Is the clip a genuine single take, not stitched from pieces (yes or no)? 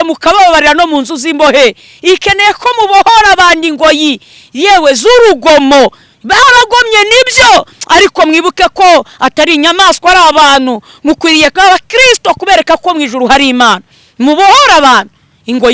yes